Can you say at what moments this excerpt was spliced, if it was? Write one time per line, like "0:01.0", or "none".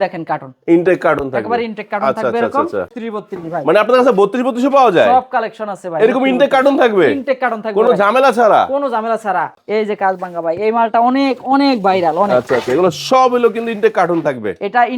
0:03.0
0:09.5